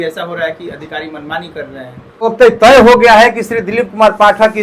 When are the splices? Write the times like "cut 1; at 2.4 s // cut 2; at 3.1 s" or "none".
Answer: cut 1; at 2.2 s